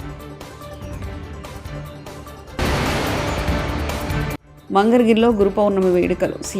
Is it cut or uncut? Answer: cut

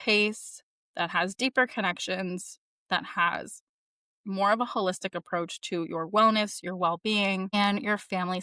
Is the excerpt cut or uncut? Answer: cut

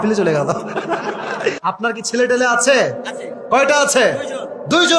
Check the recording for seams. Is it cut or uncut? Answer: cut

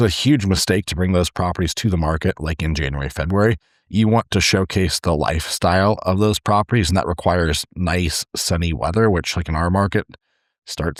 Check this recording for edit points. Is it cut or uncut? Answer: uncut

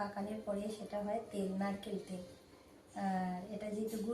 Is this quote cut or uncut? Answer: uncut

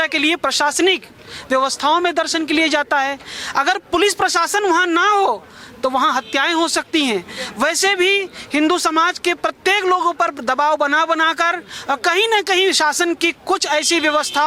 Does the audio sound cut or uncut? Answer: uncut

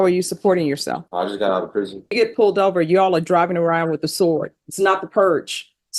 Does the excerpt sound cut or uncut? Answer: cut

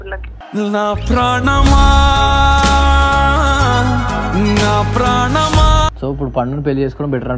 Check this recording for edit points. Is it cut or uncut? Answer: uncut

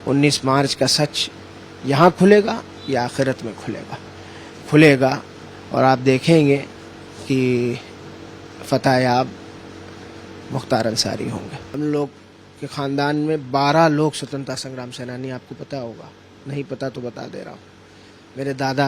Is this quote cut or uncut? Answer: cut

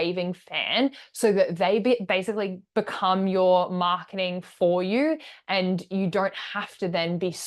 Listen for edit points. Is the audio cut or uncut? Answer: uncut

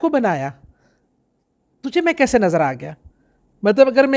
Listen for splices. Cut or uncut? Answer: uncut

